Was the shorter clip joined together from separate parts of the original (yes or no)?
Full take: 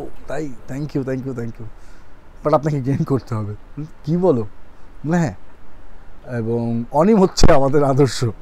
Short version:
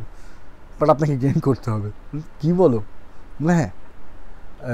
no